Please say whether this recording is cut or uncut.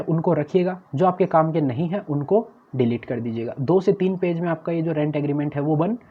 uncut